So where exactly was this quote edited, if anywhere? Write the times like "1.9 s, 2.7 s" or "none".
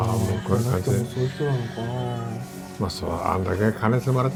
none